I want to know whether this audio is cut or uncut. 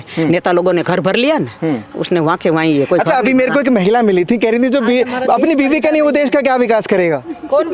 uncut